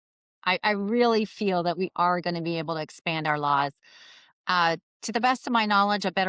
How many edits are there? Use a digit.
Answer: 0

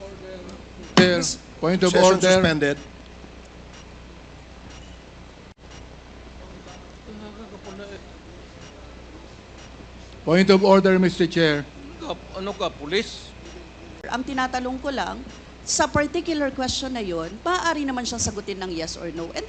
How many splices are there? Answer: 1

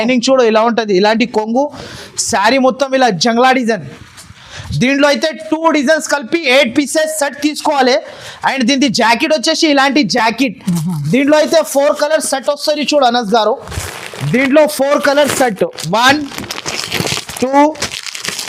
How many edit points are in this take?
0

